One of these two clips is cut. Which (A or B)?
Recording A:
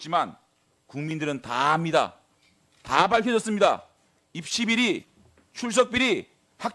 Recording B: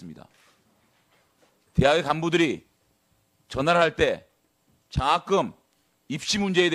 A